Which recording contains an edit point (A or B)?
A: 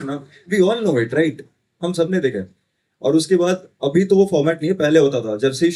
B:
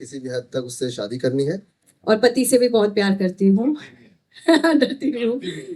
B